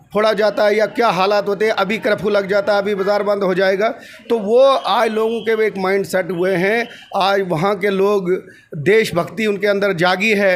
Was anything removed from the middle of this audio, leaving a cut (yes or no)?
no